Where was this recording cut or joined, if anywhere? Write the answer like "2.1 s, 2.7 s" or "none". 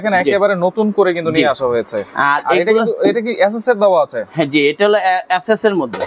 none